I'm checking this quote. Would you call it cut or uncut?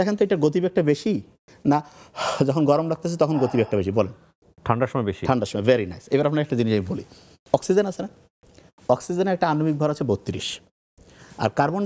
uncut